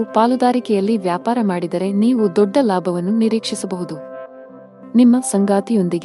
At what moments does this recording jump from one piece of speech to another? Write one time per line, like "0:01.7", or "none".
none